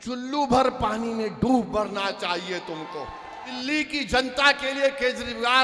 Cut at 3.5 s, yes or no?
yes